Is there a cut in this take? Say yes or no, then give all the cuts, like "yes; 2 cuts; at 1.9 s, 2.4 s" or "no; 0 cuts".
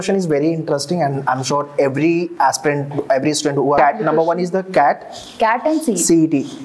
yes; 1 cut; at 3.8 s